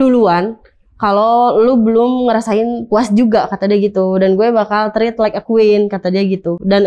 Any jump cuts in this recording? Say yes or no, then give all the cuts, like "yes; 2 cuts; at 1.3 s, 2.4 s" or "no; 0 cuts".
no; 0 cuts